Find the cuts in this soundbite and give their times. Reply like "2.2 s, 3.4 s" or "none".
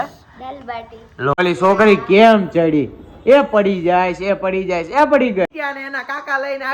1.4 s, 5.5 s